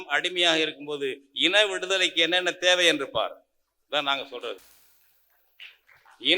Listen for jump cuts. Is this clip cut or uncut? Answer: uncut